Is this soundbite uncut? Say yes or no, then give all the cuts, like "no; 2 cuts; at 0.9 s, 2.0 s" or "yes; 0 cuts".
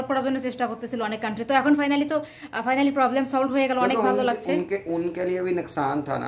yes; 0 cuts